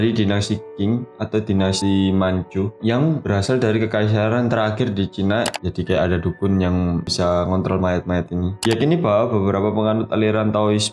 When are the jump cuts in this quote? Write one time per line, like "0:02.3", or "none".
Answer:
0:05.5